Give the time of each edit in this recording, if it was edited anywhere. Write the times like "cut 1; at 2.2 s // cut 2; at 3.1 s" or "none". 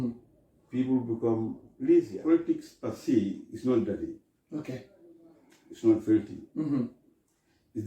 cut 1; at 2.1 s

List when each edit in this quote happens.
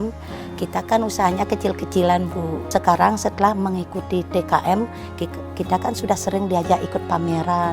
cut 1; at 2.6 s

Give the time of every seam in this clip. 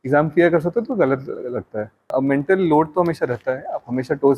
cut 1; at 2.1 s

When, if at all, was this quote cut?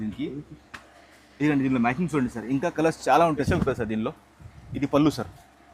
cut 1; at 3.5 s

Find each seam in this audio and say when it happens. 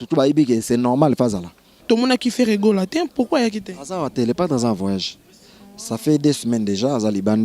cut 1; at 1.7 s

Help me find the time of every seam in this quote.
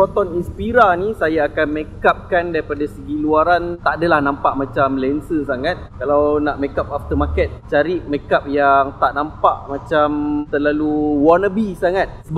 none

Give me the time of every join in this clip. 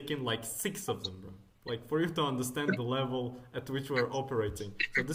none

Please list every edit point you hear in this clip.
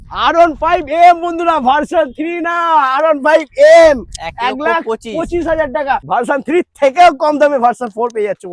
cut 1; at 6.0 s

